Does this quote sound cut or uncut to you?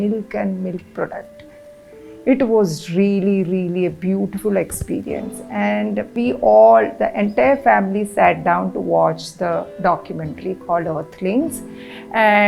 cut